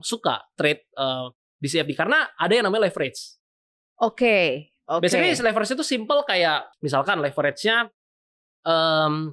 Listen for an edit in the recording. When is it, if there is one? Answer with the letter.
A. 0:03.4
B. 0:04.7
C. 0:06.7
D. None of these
C